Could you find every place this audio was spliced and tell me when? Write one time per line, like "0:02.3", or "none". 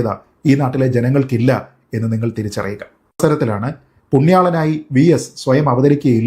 0:03.2